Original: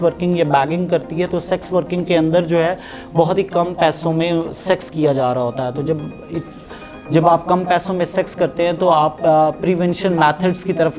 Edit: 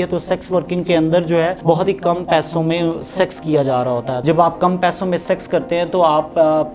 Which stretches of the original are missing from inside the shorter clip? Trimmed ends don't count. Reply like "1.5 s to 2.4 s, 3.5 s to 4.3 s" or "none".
2.8 s to 3.1 s, 5.7 s to 7.1 s